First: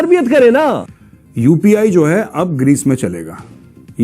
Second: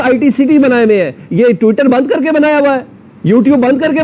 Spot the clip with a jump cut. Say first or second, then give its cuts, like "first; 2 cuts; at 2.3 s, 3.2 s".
first; 1 cut; at 1.1 s